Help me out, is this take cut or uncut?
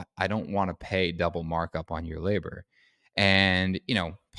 uncut